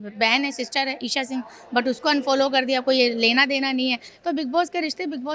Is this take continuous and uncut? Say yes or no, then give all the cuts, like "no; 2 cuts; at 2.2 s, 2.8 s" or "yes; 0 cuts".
yes; 0 cuts